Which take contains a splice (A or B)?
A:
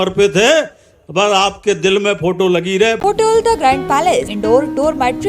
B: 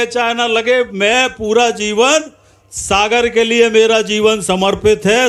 A